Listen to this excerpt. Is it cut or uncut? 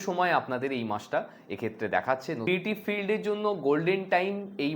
cut